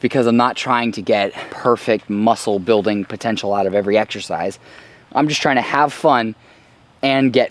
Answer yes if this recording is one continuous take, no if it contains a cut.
no